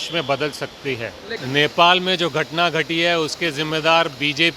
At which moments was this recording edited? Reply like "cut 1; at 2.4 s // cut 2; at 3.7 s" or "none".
cut 1; at 1.4 s